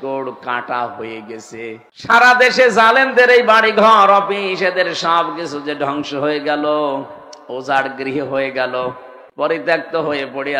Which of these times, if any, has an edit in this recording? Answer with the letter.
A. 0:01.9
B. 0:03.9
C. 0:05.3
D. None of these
A